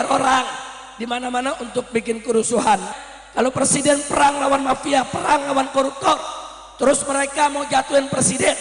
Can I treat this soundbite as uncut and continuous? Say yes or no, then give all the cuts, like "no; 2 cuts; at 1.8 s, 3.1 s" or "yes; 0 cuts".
no; 1 cut; at 2.9 s